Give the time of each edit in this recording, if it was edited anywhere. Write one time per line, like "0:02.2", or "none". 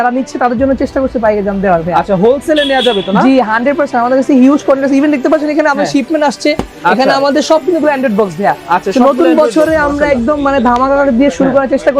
none

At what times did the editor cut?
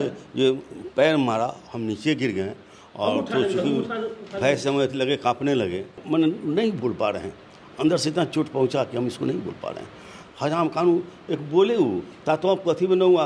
0:06.0
0:10.2

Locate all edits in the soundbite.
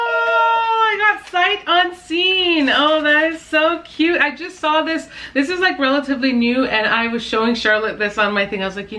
none

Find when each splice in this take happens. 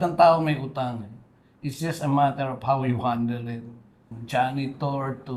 0:04.2

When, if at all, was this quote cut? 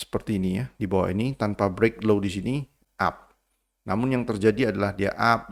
none

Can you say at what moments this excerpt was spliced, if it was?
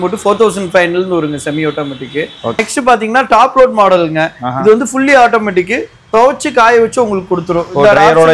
0:02.6

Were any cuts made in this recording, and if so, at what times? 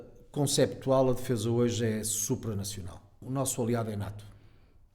0:03.2

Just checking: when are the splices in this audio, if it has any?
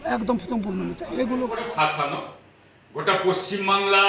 0:01.6

